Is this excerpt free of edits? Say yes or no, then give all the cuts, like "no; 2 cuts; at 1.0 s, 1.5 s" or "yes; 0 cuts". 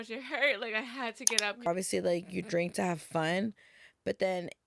no; 1 cut; at 1.7 s